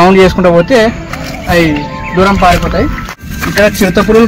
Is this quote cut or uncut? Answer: cut